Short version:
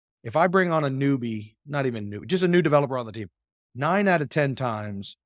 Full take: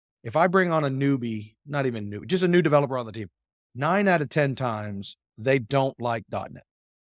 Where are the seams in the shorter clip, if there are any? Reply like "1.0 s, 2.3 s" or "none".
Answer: none